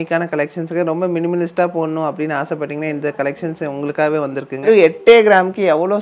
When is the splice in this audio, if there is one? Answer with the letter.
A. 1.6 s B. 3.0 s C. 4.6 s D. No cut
C